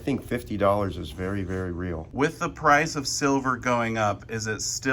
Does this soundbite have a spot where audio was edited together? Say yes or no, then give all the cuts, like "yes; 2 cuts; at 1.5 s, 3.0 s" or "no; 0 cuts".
yes; 1 cut; at 2.0 s